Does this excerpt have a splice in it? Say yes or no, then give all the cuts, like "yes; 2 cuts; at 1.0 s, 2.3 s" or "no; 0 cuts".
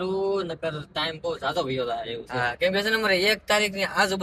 no; 0 cuts